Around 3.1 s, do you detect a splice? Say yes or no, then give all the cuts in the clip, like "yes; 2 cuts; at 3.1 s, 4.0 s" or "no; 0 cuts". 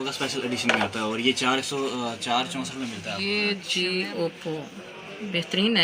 yes; 1 cut; at 3.1 s